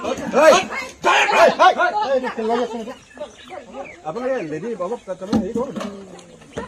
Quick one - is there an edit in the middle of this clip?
no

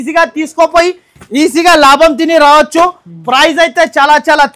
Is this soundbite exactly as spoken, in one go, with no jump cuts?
yes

